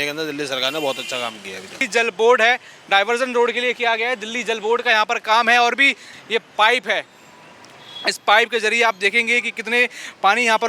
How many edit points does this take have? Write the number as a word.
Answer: two